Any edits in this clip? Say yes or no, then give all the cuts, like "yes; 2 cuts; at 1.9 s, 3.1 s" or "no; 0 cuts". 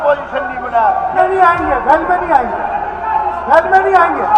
yes; 1 cut; at 1.1 s